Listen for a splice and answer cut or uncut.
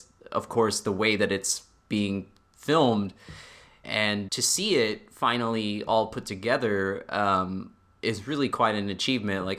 cut